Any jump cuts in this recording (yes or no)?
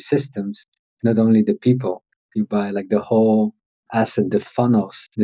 no